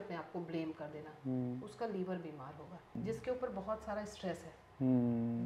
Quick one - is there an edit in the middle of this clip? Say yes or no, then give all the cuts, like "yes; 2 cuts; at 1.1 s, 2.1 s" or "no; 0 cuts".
yes; 1 cut; at 2.9 s